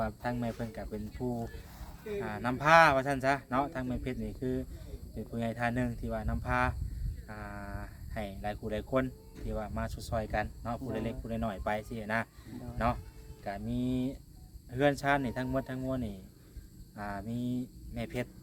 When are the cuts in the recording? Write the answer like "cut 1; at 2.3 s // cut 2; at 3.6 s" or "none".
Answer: none